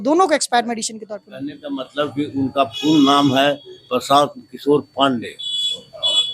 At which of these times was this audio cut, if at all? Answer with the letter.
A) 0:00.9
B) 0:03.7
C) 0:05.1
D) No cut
A